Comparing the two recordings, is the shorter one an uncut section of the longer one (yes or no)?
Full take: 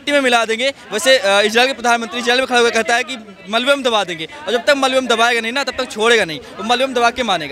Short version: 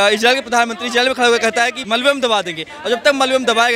no